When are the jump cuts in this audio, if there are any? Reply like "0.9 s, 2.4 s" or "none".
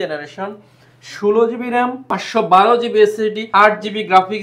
2.1 s, 3.4 s

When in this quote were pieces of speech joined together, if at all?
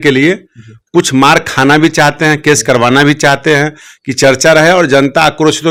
none

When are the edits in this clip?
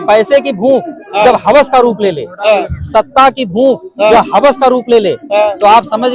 none

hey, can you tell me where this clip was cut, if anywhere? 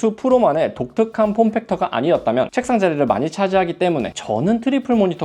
none

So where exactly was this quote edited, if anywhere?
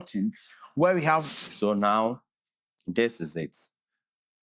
1.3 s

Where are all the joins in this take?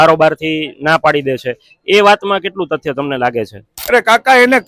3.7 s

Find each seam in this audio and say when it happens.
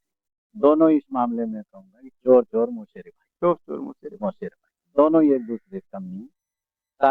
none

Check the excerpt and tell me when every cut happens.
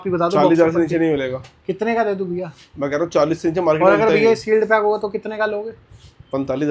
none

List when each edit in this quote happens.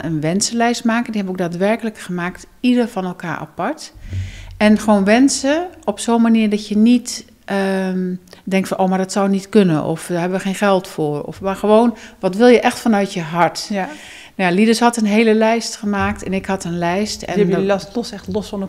none

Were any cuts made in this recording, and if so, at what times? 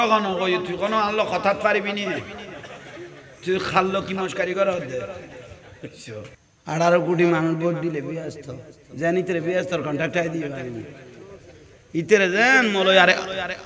6.5 s

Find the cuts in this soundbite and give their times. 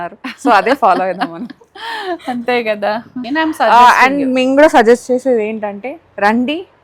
3.2 s

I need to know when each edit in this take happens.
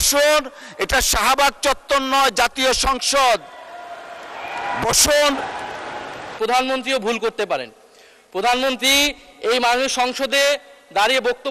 6.3 s

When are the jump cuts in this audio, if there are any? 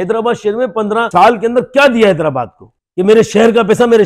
1.1 s, 2.7 s

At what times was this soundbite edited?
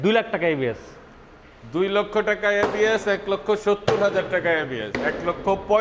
4.9 s

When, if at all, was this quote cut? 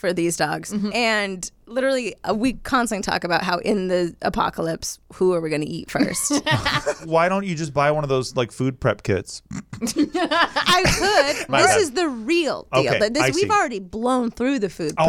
0.9 s, 7.0 s, 11.4 s

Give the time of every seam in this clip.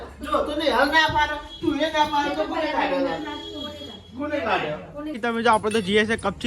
5.1 s

